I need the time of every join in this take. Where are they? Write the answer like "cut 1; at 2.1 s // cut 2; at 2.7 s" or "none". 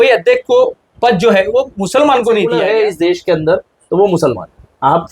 cut 1; at 2.5 s